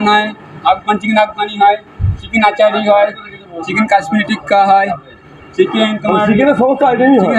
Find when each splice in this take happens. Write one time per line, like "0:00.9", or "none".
none